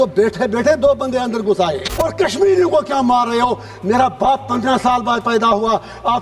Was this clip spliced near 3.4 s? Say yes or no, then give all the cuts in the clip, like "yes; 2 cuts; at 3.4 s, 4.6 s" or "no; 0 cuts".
no; 1 cut; at 1.9 s